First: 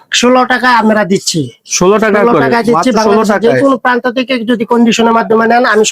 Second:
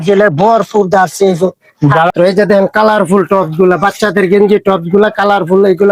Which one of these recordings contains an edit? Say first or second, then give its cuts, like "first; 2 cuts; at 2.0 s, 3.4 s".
second; 1 cut; at 2.1 s